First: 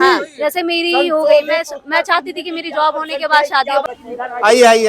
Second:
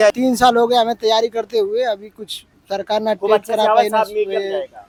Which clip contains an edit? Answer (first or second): first